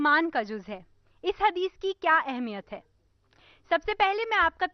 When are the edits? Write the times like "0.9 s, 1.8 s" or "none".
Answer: 3.6 s

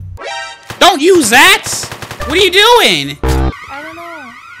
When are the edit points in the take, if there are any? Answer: 3.5 s

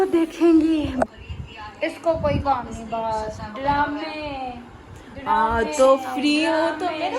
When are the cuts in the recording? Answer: 1.1 s

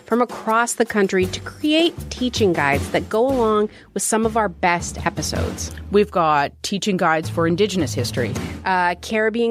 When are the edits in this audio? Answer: none

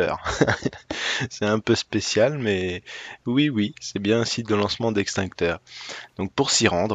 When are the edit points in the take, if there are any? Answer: 3.5 s

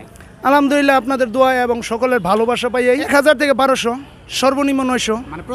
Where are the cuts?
3.1 s

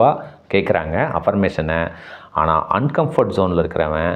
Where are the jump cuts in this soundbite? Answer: none

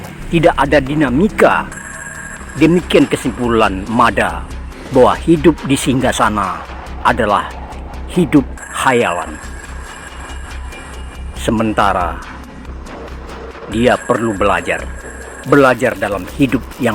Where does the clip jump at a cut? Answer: 9.8 s, 11.4 s, 12.2 s, 13.7 s

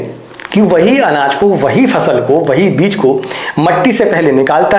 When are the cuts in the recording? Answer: none

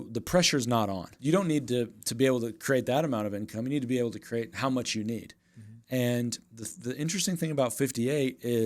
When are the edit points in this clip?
1.1 s

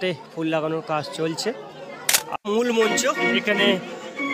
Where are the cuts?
2.3 s

